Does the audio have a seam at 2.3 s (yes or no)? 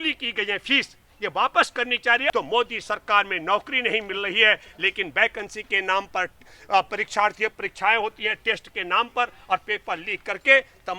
yes